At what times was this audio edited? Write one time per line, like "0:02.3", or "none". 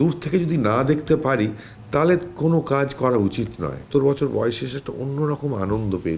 0:03.9

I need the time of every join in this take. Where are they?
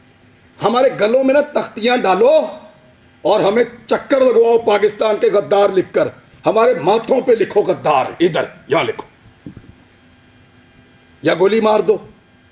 0:07.2

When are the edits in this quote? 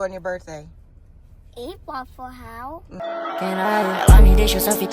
0:02.9

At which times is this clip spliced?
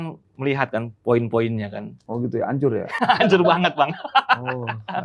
none

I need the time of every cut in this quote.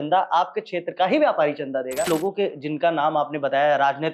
0:02.1

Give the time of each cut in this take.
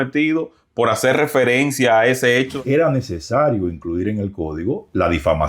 0:02.5

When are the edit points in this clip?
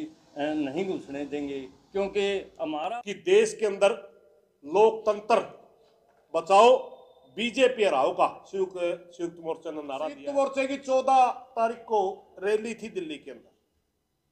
0:02.7
0:10.2

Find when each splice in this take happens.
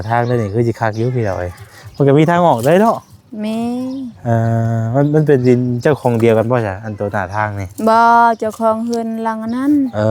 none

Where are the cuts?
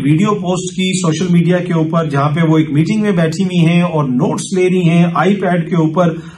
none

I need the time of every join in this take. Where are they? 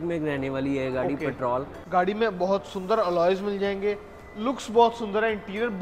0:01.8

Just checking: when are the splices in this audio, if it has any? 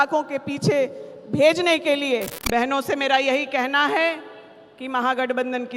0:02.3

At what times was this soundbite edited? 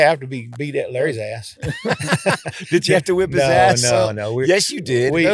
none

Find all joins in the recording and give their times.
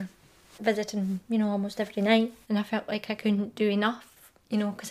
0:02.4

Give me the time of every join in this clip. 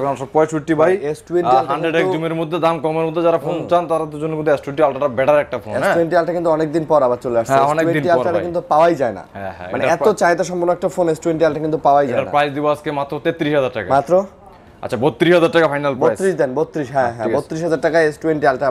none

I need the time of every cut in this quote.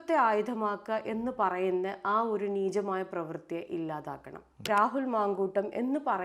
0:04.6

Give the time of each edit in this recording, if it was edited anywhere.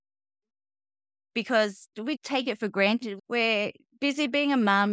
0:01.9
0:03.2

